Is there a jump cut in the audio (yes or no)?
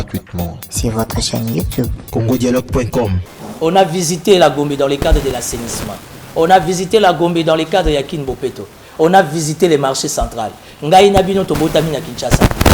yes